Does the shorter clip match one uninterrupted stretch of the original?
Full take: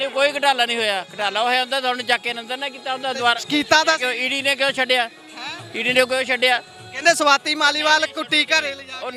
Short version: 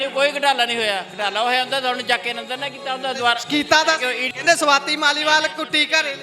no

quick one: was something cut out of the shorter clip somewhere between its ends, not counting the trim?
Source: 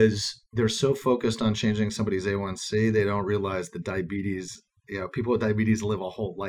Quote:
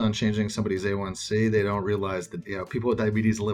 yes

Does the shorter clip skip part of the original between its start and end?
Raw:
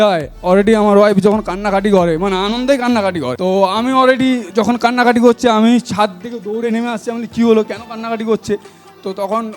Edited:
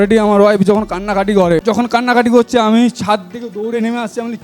yes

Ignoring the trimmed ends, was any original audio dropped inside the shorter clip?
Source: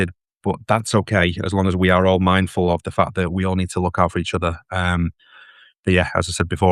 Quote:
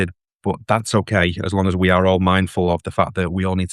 no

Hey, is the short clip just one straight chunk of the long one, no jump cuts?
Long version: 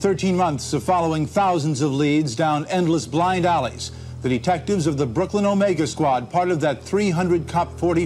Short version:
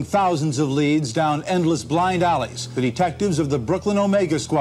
no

